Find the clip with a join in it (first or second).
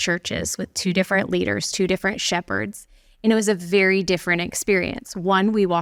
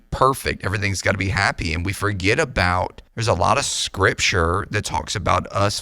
second